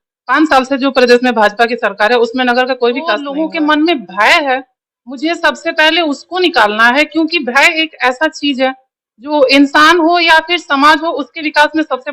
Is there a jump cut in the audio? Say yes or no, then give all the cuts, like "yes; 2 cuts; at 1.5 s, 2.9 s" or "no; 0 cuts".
yes; 1 cut; at 3.3 s